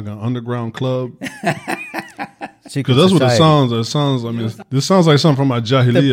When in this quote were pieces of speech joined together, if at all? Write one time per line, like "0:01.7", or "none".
0:04.2